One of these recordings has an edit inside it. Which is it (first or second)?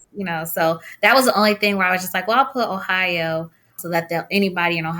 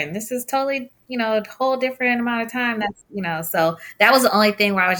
first